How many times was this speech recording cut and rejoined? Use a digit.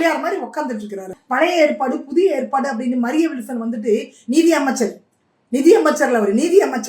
1